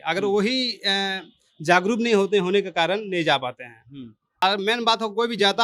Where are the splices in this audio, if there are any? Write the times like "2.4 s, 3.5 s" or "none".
4.4 s